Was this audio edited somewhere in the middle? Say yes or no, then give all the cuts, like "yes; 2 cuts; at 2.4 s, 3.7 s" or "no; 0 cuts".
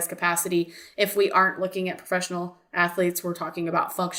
no; 0 cuts